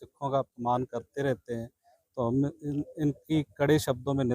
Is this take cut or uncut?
uncut